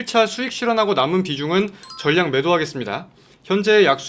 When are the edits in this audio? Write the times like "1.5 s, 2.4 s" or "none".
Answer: none

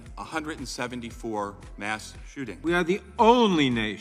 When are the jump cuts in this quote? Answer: 2.5 s

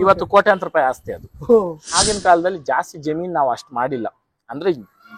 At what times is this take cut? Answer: 1.9 s

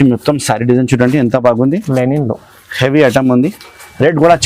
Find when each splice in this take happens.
none

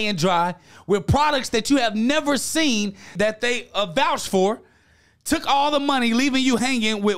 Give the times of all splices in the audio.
3.1 s

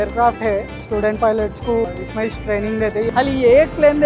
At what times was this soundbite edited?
1.8 s, 3.1 s

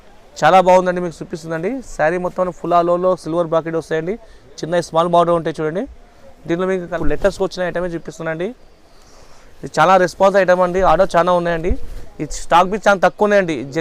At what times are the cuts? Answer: 6.9 s

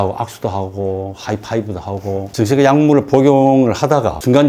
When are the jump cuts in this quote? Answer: 2.3 s

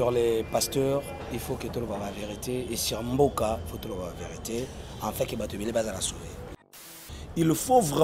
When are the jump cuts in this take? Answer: 6.7 s

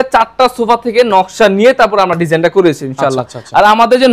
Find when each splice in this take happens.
none

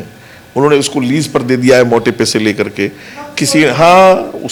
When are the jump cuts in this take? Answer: none

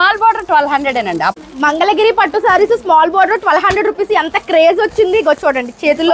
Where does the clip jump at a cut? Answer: 1.4 s

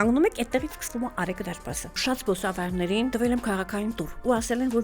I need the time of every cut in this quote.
2.0 s, 3.1 s

